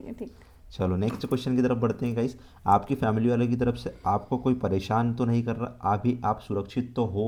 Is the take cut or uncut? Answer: uncut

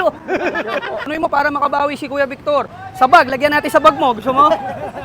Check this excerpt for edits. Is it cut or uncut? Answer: cut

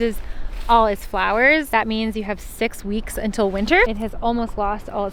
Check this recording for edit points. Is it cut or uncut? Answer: cut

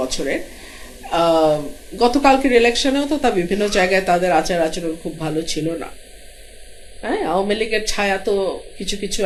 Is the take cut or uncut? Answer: uncut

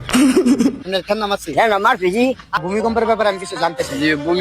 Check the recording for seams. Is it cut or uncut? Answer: cut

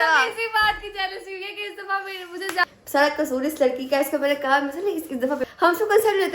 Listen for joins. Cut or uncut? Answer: cut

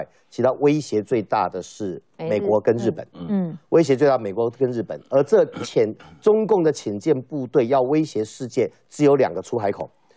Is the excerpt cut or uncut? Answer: uncut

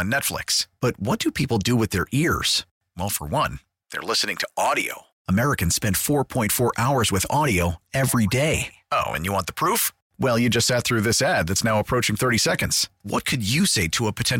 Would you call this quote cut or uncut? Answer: uncut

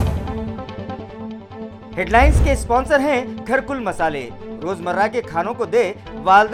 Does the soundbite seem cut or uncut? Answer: uncut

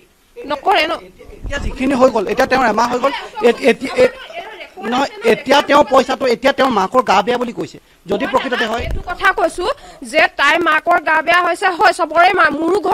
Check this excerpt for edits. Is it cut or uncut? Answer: uncut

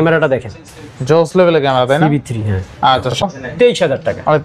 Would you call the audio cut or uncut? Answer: cut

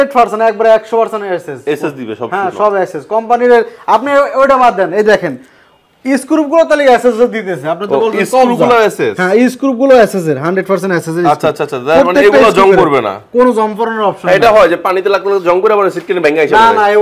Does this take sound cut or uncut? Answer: uncut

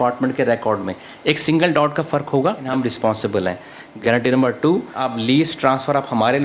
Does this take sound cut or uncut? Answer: cut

